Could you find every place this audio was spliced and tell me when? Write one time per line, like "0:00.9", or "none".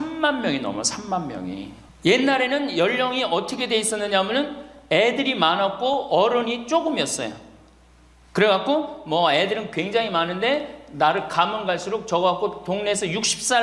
0:01.8

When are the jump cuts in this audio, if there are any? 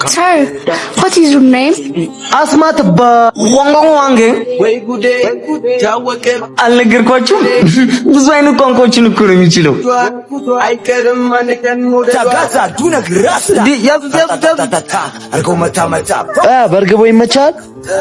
0:12.3

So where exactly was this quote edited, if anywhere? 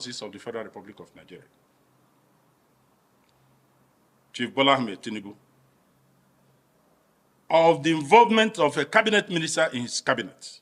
none

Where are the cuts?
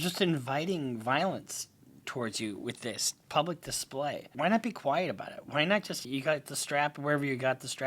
0:04.3
0:06.0

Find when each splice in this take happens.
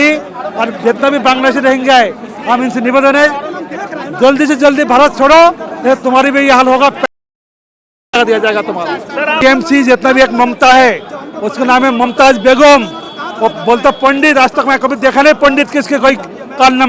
0:09.6

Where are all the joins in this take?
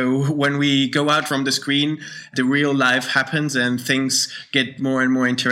0:01.3
0:02.3

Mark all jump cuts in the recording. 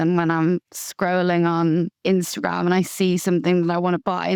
none

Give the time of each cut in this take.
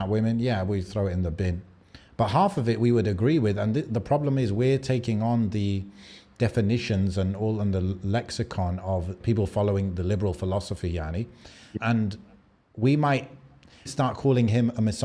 0:09.2
0:11.7
0:13.9

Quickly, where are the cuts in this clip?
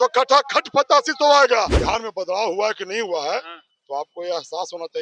0:01.8

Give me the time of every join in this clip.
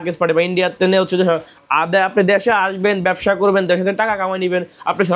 none

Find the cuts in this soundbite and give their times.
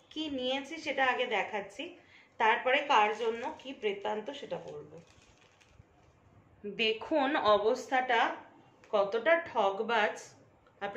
0:06.5

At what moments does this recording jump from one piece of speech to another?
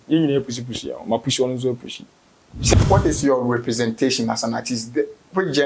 0:02.7

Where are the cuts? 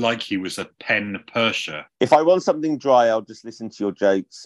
0:01.8

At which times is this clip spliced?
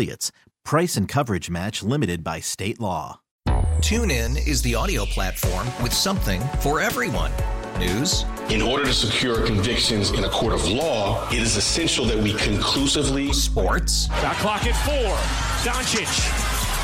0:03.2

